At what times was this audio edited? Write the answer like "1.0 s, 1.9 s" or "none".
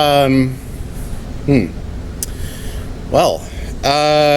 none